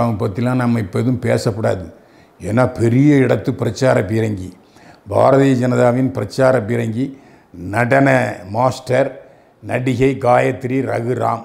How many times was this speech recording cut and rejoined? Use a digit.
0